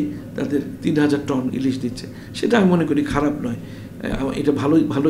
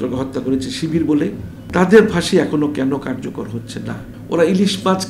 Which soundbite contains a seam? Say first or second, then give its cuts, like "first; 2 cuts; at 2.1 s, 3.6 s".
second; 2 cuts; at 1.5 s, 4.1 s